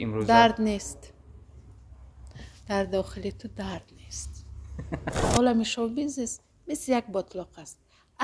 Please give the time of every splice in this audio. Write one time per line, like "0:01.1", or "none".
0:05.2